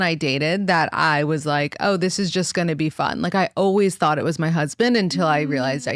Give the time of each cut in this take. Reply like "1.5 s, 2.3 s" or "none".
none